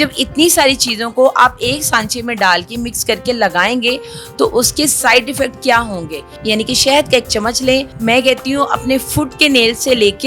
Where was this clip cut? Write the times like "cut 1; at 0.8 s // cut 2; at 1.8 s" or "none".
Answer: cut 1; at 6.4 s // cut 2; at 7.9 s